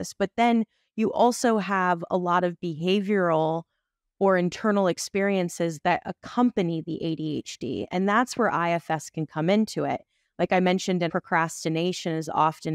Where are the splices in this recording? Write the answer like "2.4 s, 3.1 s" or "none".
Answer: 11.1 s